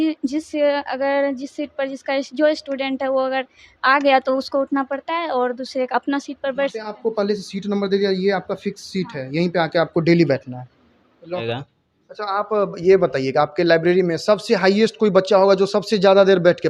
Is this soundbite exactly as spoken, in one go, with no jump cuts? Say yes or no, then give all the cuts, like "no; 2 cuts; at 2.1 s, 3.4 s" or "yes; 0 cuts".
no; 1 cut; at 11.4 s